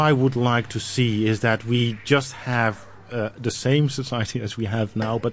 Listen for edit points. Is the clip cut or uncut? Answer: uncut